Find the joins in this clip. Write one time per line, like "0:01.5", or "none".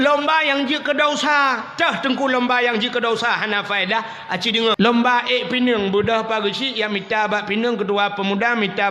0:04.8